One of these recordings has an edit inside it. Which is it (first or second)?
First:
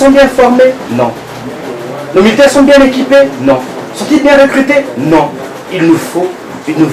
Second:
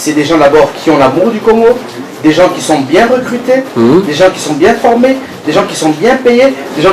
first